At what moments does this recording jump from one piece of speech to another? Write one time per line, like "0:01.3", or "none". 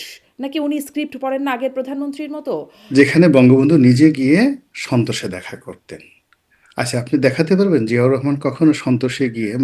0:02.8

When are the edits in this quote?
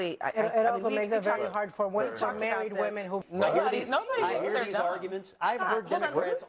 0:03.2

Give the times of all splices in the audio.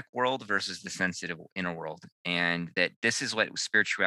none

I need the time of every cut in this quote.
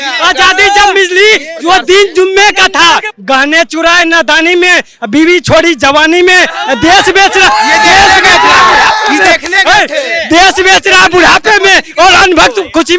0:03.1

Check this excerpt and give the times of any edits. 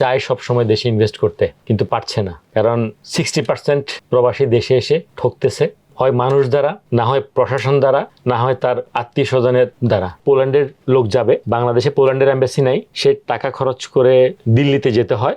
0:01.9
0:08.9
0:10.0

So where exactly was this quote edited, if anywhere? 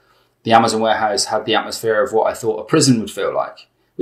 none

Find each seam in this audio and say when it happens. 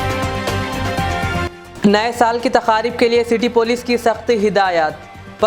none

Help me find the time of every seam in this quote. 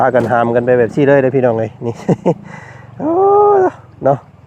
none

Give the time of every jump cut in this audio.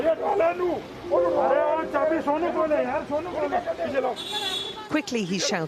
none

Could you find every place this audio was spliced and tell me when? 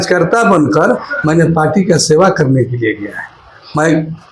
none

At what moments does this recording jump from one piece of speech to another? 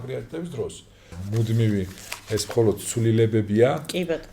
0:01.2

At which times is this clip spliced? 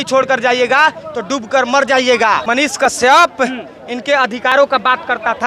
0:02.4

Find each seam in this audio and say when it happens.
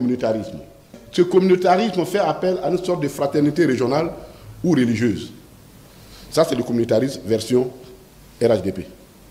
none

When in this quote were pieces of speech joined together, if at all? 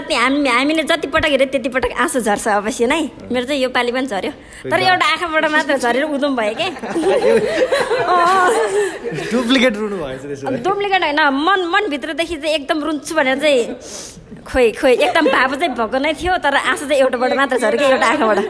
none

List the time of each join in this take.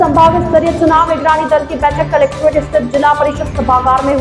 none

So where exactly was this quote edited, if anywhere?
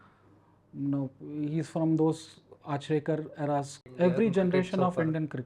0:03.8

